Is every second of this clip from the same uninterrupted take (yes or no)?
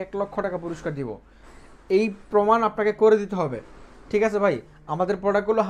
yes